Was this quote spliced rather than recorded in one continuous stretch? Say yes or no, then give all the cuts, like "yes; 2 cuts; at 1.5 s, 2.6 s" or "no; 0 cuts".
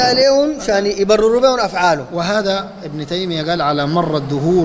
no; 0 cuts